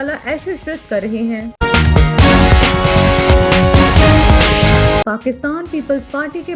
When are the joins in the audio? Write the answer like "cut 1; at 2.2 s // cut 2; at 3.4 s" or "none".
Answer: cut 1; at 1.5 s // cut 2; at 5.0 s